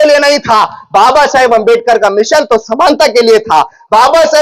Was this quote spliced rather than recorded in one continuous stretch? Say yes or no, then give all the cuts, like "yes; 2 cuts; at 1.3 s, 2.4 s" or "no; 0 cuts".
no; 0 cuts